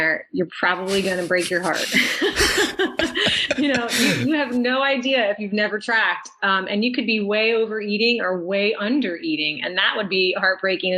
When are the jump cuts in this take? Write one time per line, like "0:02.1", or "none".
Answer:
none